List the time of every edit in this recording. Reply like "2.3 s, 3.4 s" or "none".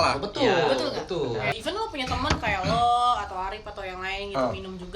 1.5 s